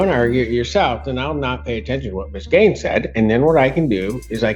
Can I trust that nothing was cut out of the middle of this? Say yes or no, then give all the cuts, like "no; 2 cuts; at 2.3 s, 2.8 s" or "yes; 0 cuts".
yes; 0 cuts